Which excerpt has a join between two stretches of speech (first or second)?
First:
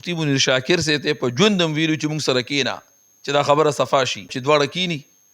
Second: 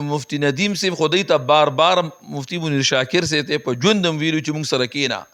first